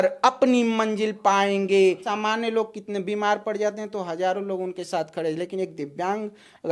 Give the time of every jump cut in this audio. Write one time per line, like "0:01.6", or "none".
0:02.1